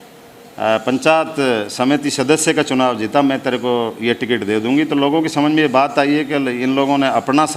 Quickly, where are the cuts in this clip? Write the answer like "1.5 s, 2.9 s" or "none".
none